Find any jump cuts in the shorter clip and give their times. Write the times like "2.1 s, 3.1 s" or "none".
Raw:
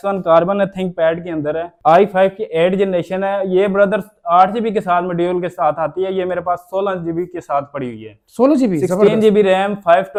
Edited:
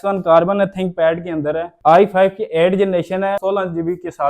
3.4 s